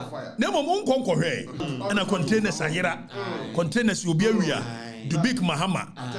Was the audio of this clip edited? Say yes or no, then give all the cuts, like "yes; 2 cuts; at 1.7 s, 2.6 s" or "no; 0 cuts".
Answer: yes; 1 cut; at 1.6 s